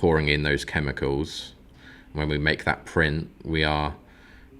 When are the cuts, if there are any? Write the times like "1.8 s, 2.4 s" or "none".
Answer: 1.6 s

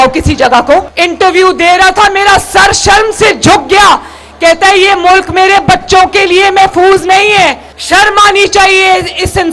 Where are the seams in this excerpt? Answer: 0.9 s, 7.7 s

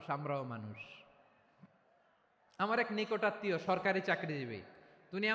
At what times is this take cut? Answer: none

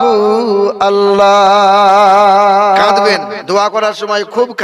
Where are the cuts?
3.1 s

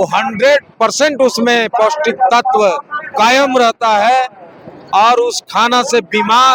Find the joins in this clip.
none

